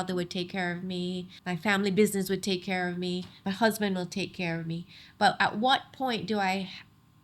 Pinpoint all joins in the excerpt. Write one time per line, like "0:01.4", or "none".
0:01.3